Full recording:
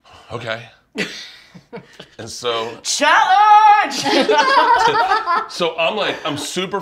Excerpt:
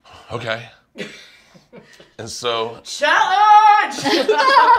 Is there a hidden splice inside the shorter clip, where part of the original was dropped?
no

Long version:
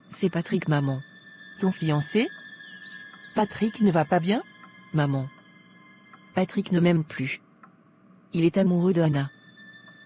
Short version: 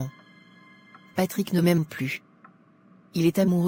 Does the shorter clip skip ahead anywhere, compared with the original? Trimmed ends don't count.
no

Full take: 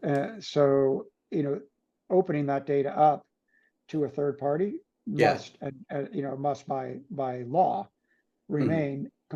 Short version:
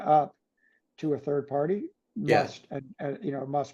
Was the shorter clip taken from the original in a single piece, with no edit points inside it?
yes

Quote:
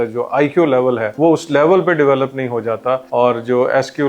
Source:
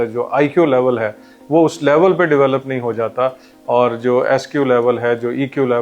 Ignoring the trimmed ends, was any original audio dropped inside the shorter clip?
yes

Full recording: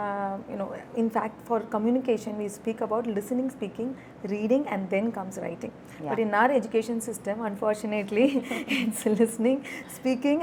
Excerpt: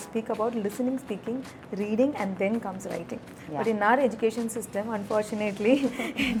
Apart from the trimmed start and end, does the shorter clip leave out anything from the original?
no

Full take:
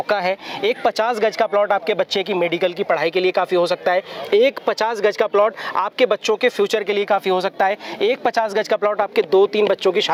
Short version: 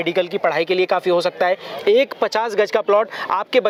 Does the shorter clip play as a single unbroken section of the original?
yes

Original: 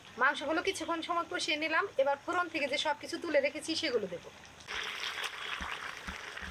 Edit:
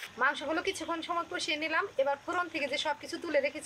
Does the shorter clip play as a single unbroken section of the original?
yes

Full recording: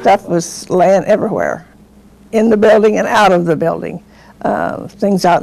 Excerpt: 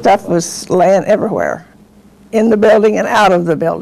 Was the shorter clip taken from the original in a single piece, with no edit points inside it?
yes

